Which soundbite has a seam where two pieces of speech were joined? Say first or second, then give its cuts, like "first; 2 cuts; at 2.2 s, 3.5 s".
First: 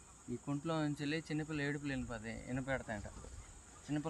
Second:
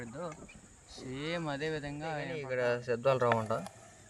second; 1 cut; at 2.5 s